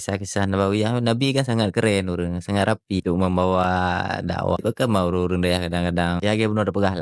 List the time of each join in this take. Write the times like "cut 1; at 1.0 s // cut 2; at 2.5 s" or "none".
cut 1; at 3.0 s // cut 2; at 4.6 s // cut 3; at 6.2 s